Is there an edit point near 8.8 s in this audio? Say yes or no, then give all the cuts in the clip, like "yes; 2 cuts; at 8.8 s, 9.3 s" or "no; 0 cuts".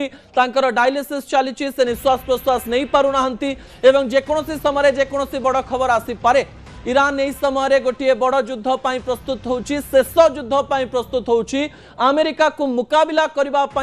yes; 1 cut; at 8.8 s